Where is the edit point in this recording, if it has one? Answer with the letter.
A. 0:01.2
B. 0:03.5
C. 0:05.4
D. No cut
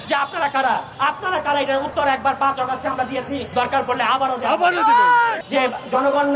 C